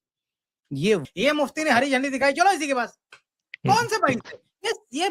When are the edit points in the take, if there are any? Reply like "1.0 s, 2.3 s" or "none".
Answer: 1.1 s